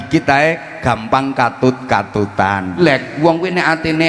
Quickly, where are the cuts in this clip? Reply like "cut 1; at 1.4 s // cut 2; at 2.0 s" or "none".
cut 1; at 2.8 s